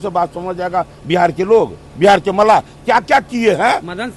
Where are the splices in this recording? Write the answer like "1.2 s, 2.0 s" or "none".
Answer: none